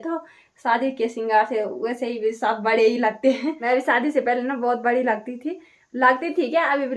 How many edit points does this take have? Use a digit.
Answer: 1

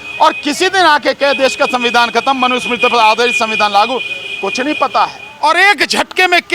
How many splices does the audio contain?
1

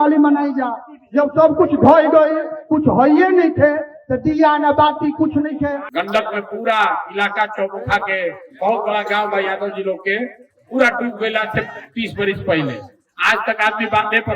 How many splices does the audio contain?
1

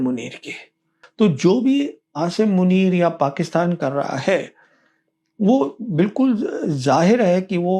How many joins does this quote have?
1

